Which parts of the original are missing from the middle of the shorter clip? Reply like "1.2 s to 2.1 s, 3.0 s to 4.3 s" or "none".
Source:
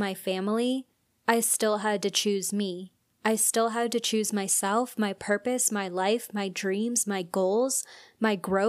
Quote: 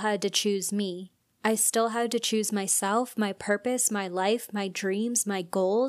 none